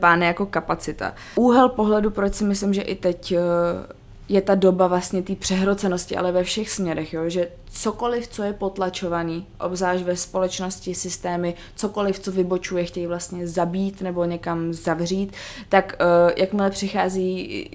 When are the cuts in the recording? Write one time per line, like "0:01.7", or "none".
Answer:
0:01.2